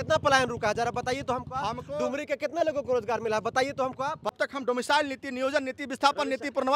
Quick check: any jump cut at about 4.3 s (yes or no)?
yes